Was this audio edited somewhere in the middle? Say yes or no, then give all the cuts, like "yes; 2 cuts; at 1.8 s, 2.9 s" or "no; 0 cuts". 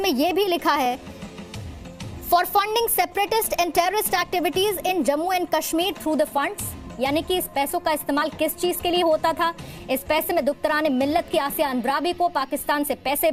no; 0 cuts